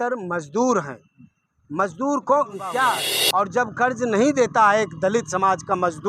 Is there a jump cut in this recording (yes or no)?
yes